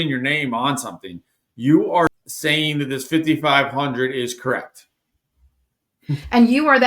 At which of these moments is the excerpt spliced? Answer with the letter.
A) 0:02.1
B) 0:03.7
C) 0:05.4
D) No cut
A